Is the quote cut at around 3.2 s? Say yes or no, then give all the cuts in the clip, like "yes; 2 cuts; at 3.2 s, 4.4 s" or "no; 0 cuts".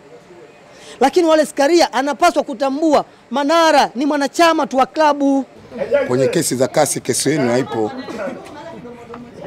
no; 1 cut; at 5.6 s